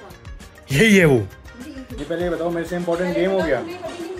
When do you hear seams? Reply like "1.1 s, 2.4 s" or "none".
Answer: 1.9 s